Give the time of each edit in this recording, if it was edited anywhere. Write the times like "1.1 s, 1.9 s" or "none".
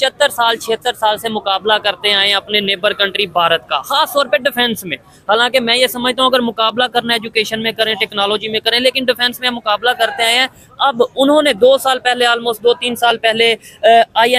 none